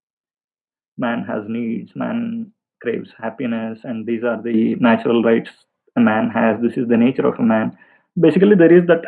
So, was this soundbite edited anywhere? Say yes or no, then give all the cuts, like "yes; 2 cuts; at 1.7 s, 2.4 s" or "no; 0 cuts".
no; 0 cuts